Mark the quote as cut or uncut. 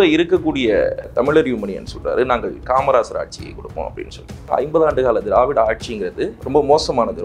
cut